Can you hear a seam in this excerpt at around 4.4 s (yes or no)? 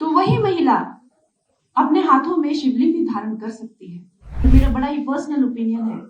yes